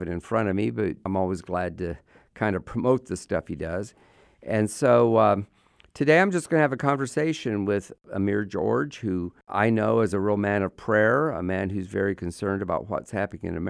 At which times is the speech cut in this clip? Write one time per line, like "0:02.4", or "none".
0:01.1
0:08.0
0:09.4